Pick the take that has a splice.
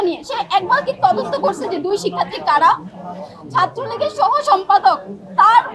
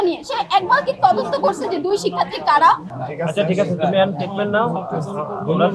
second; 1 cut; at 3.0 s

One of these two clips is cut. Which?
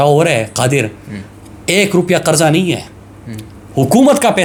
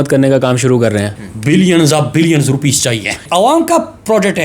second; 2 cuts; at 1.1 s, 3.2 s

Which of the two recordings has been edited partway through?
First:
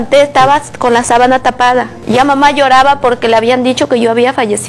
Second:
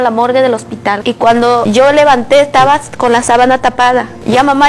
second; 1 cut; at 1.0 s

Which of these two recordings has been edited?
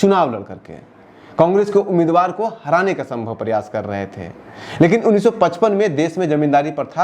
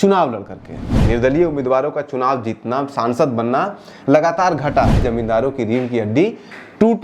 second; 2 cuts; at 1.0 s, 5.0 s

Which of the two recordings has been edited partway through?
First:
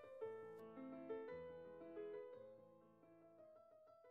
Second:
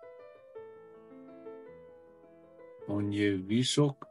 second; 1 cut; at 2.9 s

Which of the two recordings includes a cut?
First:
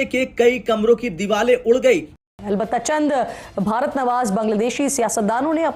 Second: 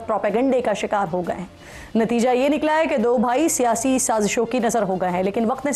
first; 1 cut; at 2.2 s

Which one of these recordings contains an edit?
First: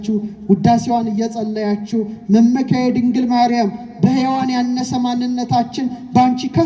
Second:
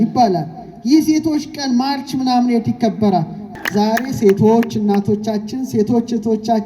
second; 1 cut; at 3.5 s

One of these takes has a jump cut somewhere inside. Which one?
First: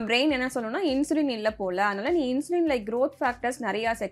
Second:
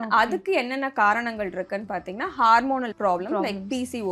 second; 1 cut; at 2.9 s

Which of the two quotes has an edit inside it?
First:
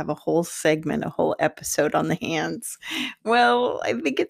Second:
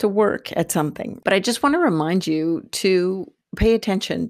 second; 1 cut; at 1.1 s

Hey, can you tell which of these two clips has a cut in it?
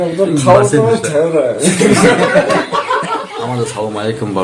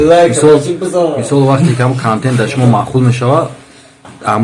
first; 1 cut; at 3.2 s

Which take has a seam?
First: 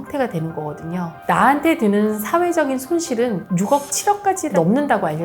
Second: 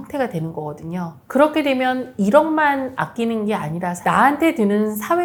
first; 1 cut; at 1.2 s

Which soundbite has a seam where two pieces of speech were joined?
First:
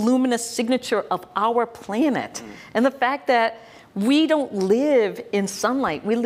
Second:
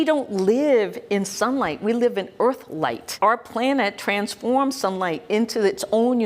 second; 1 cut; at 3.1 s

